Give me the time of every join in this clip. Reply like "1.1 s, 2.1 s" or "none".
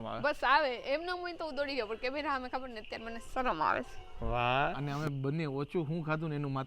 4.8 s

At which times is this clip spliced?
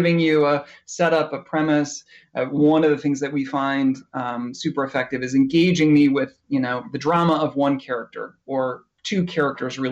none

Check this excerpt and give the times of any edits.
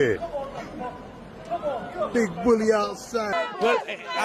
3.3 s

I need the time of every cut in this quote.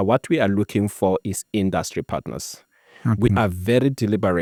none

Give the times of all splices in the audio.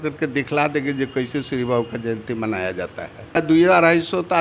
3.4 s

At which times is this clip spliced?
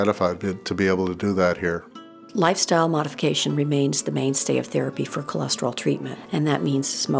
2.3 s, 6.1 s

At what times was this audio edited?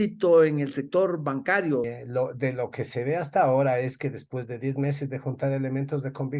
1.9 s

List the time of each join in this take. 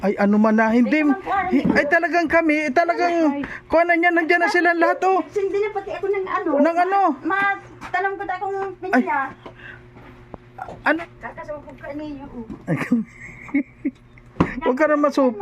11.0 s

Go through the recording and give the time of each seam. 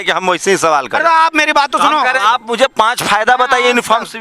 2.2 s

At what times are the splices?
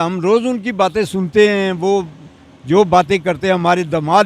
none

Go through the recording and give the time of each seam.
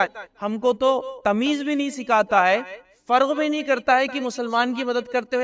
1.1 s

